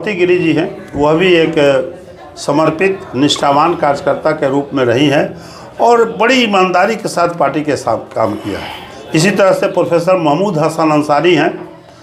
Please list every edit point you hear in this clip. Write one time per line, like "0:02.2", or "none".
none

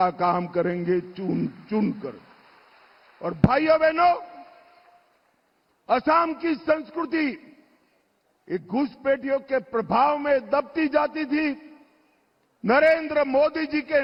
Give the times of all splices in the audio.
none

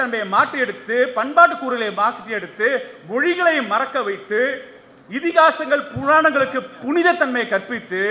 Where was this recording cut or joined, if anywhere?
none

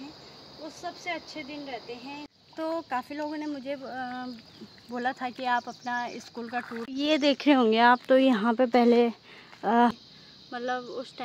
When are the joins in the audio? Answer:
0:02.3
0:06.9
0:09.9

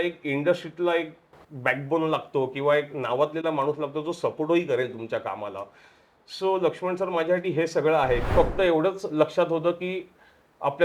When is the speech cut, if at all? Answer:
0:08.3

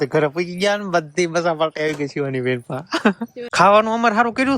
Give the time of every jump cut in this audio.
0:03.4

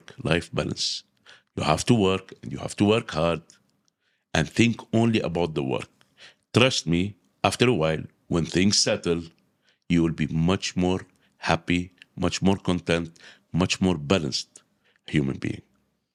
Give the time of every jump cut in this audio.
none

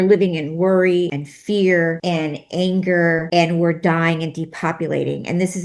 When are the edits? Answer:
0:01.3
0:02.0
0:03.2

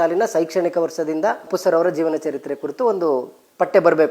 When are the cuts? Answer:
0:01.5

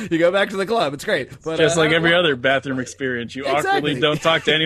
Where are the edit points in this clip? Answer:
0:01.4

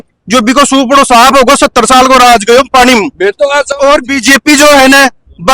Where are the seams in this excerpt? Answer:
none

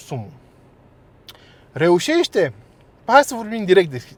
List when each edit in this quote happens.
none

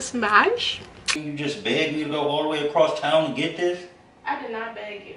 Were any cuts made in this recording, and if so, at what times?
0:01.1

